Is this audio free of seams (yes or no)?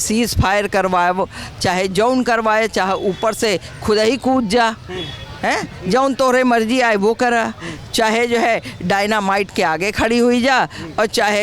yes